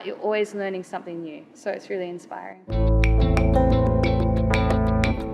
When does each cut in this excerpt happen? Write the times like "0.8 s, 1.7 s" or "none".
2.8 s